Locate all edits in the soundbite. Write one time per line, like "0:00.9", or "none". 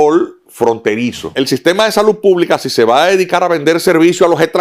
0:01.3